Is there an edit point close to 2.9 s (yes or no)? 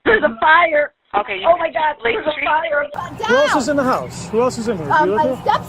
yes